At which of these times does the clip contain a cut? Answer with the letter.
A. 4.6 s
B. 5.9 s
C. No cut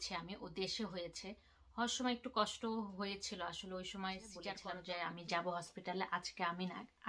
A